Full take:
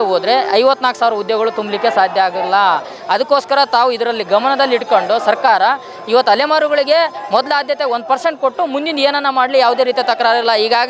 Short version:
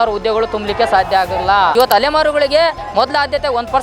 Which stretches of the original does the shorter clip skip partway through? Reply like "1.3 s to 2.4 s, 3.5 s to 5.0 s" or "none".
2.8 s to 6.1 s